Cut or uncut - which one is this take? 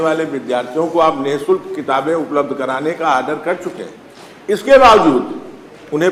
uncut